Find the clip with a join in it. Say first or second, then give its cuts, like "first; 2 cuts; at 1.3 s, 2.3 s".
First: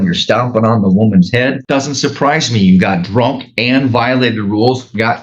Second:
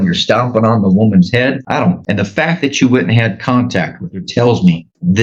first; 1 cut; at 1.6 s